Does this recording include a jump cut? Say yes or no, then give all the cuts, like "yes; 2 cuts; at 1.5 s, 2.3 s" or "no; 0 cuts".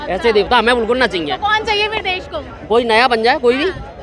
no; 0 cuts